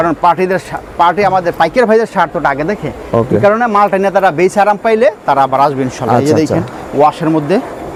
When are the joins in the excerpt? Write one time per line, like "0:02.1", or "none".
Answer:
none